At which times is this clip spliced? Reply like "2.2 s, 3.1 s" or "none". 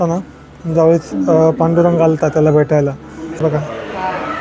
3.3 s